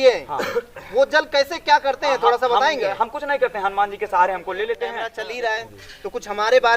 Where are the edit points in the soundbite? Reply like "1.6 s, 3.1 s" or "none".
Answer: 5.1 s